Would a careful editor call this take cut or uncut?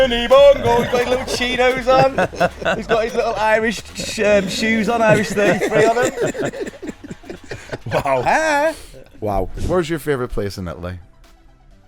cut